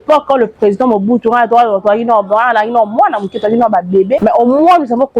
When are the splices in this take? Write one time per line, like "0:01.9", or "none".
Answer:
0:04.2